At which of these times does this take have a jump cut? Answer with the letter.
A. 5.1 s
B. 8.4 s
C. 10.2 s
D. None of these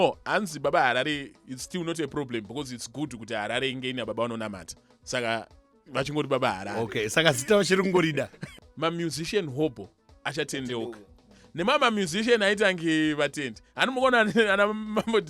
B